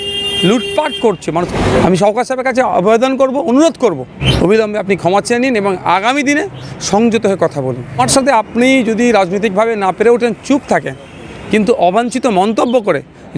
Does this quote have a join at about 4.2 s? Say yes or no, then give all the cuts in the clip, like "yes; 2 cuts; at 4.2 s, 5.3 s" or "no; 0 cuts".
yes; 3 cuts; at 1.5 s, 4.2 s, 8.0 s